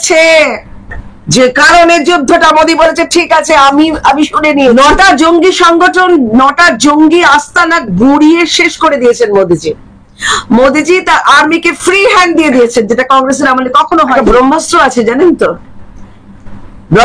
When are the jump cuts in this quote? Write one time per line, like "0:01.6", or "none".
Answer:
0:04.7
0:14.1